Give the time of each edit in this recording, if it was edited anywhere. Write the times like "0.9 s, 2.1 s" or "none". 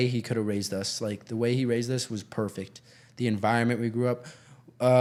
none